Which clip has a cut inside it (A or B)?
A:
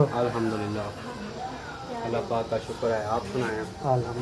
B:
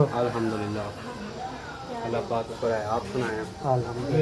B